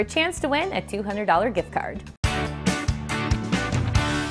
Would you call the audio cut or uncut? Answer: cut